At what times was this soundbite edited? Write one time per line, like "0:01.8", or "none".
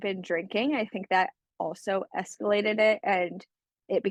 none